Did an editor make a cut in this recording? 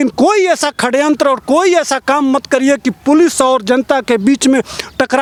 no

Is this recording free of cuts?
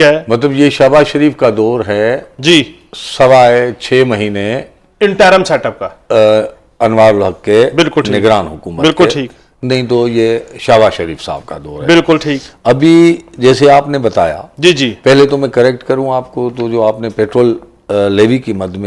yes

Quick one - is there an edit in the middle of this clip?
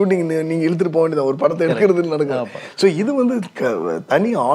no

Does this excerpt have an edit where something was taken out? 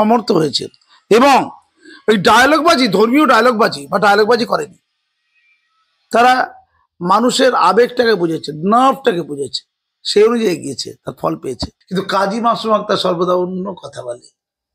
yes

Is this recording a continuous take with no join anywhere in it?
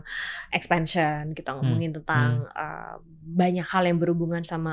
yes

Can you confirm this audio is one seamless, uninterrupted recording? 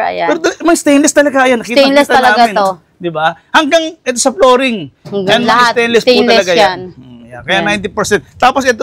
yes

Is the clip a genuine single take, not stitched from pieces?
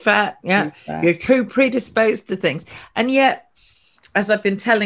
yes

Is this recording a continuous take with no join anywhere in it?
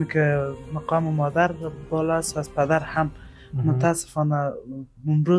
yes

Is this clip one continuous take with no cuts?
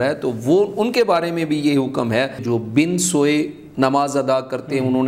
no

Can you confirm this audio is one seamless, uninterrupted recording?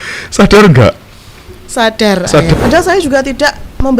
no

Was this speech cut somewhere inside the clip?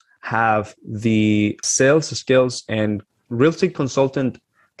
yes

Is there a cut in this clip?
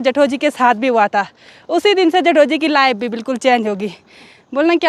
no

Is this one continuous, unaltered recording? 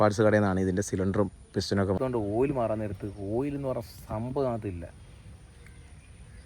no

